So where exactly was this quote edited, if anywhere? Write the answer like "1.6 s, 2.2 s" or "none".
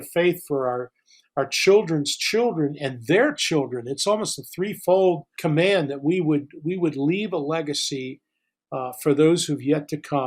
5.3 s